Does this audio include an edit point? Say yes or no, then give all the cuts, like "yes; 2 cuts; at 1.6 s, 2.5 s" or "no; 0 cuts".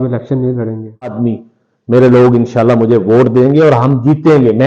yes; 1 cut; at 1.2 s